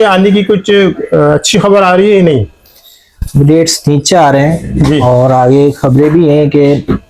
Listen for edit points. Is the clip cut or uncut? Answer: uncut